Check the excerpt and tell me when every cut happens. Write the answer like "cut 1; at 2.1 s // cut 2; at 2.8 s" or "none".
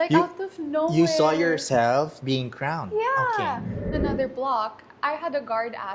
cut 1; at 3.9 s